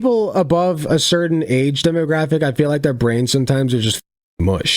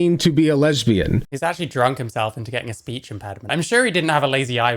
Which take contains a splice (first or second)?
second